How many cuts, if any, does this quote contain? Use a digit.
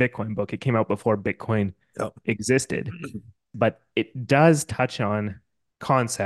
1